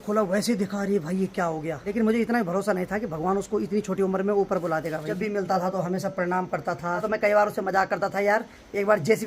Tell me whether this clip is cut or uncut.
cut